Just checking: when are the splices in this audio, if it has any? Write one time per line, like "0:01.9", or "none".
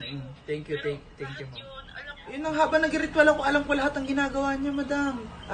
0:02.2